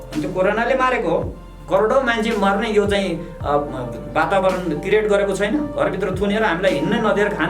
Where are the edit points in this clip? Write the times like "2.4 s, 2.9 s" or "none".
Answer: 1.5 s